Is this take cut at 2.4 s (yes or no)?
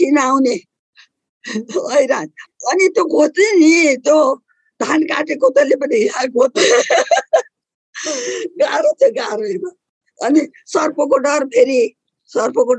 yes